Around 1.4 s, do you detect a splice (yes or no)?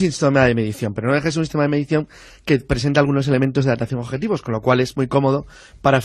no